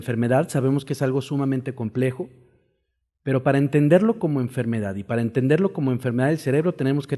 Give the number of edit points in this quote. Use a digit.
1